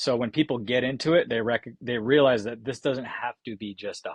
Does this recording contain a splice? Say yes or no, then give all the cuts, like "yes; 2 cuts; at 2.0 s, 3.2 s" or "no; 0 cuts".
no; 0 cuts